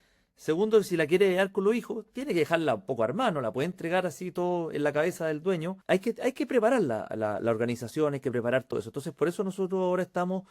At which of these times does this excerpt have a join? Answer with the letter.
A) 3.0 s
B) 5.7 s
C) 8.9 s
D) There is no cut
B